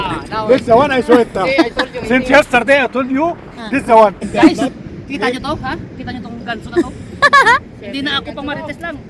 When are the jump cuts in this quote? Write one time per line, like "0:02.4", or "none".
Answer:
0:04.3